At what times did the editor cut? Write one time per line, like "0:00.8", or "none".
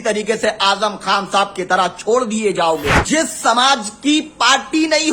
0:03.0